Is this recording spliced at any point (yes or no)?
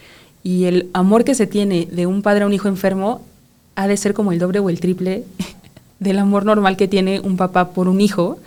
no